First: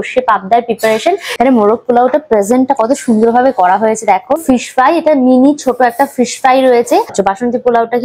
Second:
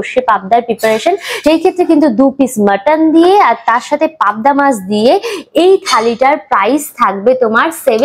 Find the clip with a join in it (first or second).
first